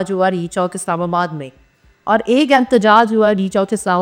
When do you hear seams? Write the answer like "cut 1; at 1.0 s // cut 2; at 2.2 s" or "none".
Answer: none